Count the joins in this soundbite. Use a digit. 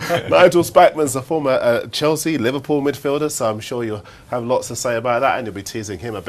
1